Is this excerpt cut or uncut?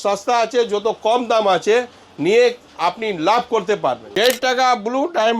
cut